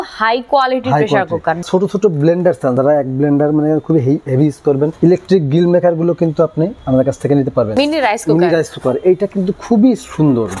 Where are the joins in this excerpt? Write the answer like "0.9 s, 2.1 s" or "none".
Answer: 1.6 s, 2.8 s, 4.9 s, 6.8 s, 7.7 s